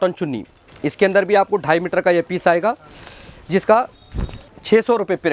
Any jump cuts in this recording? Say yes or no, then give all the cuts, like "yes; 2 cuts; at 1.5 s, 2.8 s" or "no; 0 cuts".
no; 0 cuts